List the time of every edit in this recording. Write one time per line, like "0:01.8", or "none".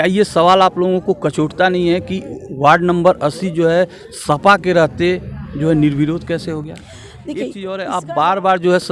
0:07.4